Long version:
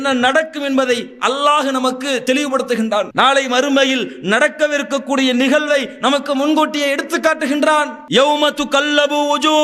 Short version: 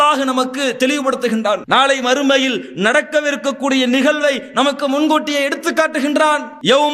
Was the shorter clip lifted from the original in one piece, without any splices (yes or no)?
yes